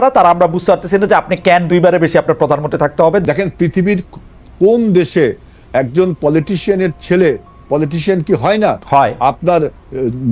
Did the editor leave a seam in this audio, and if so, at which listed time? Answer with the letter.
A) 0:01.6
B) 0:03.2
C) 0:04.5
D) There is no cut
B